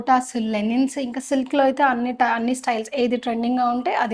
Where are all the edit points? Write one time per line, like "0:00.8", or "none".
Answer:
none